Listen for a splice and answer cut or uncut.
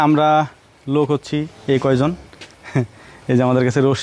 uncut